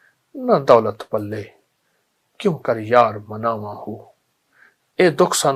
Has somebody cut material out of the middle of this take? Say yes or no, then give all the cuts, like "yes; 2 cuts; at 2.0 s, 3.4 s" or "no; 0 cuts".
no; 0 cuts